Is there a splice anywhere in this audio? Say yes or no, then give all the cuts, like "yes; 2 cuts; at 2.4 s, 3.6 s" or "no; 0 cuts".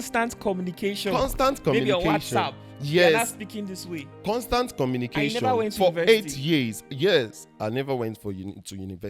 no; 0 cuts